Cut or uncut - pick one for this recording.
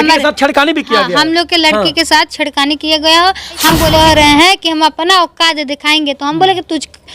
cut